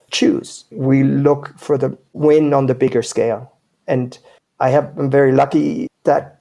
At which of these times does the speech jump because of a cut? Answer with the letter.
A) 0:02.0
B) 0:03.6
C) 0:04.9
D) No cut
A